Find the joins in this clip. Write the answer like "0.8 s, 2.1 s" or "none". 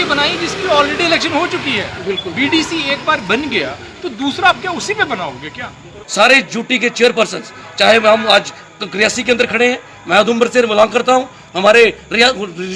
6.0 s

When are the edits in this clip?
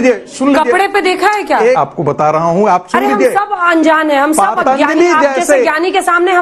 1.8 s

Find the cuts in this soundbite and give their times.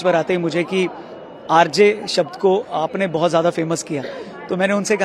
none

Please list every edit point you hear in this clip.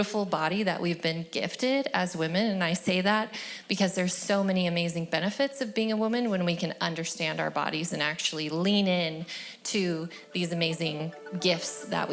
11.2 s

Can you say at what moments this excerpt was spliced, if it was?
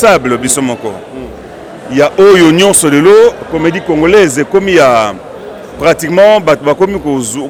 none

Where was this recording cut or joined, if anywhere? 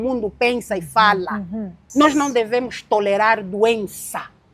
1.8 s

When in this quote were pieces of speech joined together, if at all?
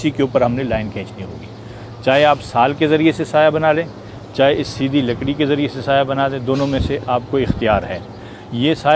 none

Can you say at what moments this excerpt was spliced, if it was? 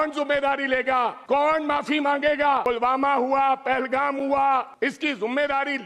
1.2 s, 2.6 s, 4.7 s

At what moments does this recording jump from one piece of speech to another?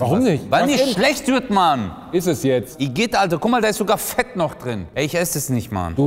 2.7 s, 4.9 s

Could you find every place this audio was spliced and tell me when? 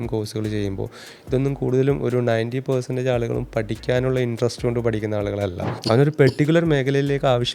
5.7 s

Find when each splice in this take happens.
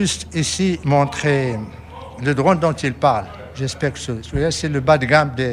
none

